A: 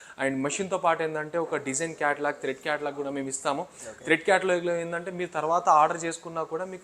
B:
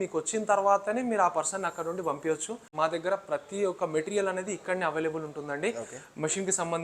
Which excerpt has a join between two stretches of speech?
B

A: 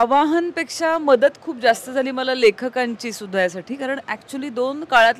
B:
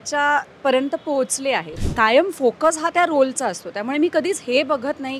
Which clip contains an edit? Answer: B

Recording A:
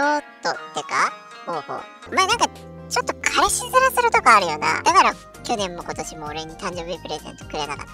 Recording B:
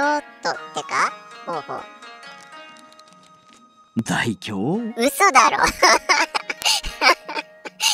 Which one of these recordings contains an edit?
A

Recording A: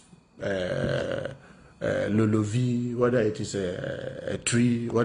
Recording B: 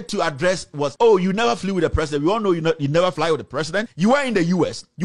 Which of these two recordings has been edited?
B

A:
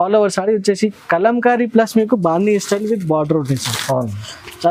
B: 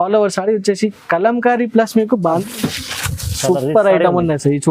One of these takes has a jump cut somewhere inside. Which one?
B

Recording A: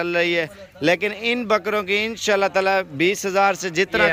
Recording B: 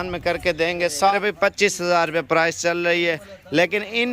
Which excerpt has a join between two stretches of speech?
B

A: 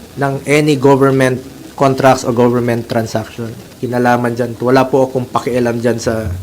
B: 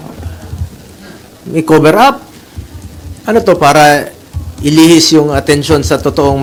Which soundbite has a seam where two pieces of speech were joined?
A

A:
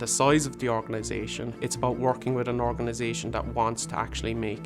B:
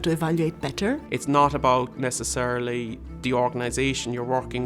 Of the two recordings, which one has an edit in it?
B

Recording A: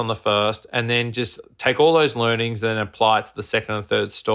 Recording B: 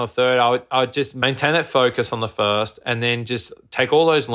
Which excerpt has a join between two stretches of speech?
B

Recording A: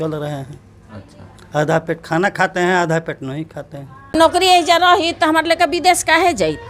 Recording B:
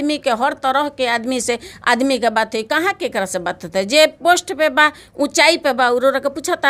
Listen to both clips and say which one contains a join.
A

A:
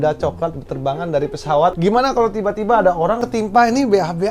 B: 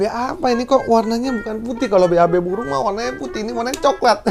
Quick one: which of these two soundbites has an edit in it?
A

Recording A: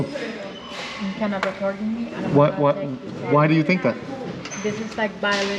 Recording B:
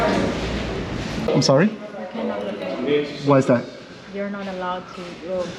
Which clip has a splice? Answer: B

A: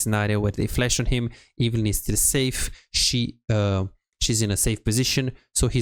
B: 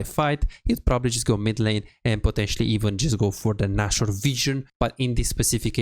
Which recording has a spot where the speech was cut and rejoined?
B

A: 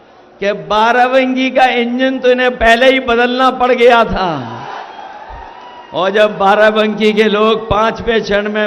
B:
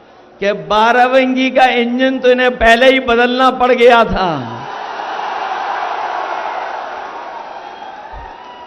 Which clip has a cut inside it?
A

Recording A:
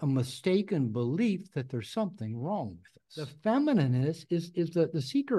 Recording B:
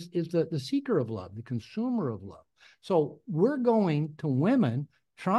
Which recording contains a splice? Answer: A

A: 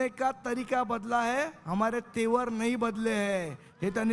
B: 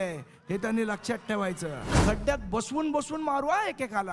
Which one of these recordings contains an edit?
B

